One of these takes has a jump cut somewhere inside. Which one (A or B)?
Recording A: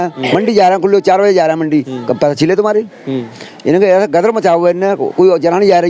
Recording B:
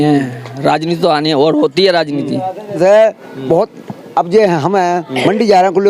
B